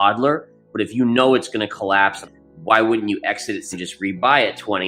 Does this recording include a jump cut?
yes; 2 cuts; at 2.3 s, 3.8 s

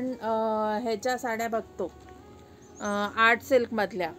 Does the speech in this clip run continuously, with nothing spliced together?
yes; 0 cuts

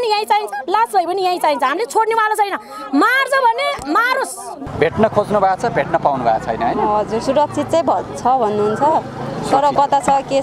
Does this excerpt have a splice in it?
yes; 1 cut; at 4.6 s

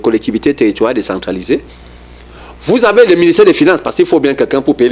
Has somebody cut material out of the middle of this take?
no; 0 cuts

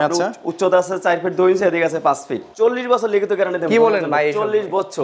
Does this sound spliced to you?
yes; 1 cut; at 2.4 s

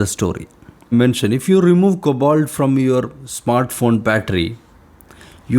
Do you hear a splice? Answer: yes; 1 cut; at 0.9 s

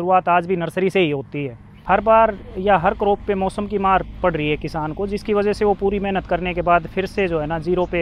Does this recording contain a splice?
yes; 1 cut; at 1.7 s

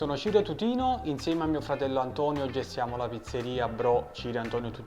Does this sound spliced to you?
no; 0 cuts

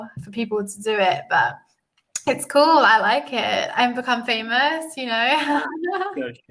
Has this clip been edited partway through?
no; 0 cuts

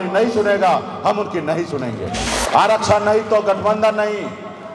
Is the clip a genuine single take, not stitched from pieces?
no; 1 cut; at 2.3 s

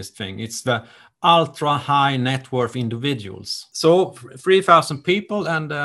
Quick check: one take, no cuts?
no; 1 cut; at 3.6 s

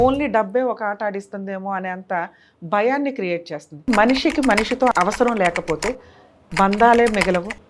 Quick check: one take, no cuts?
no; 2 cuts; at 3.9 s, 4.9 s

